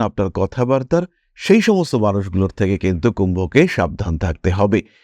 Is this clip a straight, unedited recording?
yes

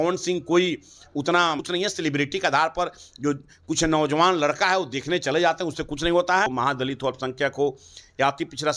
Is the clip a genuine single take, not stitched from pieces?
no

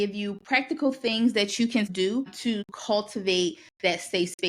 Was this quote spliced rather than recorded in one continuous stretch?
yes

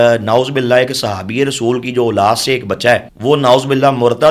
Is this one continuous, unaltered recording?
no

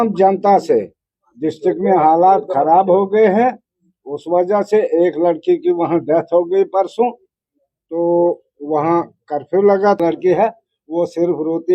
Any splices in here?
yes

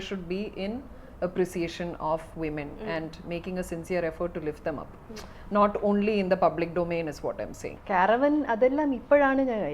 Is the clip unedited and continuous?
no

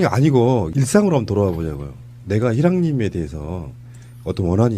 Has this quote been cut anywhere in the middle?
yes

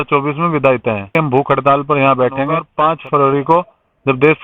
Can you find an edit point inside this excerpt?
yes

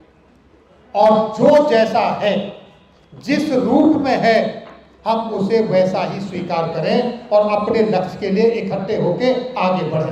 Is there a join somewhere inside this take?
no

